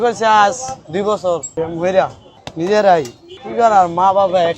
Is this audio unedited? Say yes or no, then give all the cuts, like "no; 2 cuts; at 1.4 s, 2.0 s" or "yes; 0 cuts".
no; 2 cuts; at 1.5 s, 2.2 s